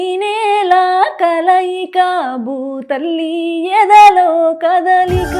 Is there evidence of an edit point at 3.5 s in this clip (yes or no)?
no